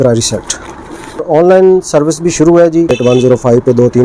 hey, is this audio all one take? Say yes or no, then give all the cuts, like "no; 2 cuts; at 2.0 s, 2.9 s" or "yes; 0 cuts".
no; 2 cuts; at 1.2 s, 2.9 s